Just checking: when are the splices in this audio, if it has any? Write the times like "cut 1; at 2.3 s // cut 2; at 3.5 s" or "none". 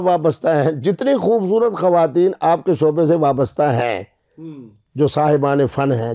none